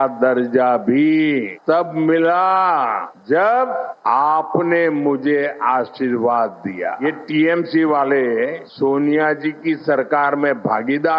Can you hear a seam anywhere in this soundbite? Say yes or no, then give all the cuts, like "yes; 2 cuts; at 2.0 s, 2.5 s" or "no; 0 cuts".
yes; 1 cut; at 7.0 s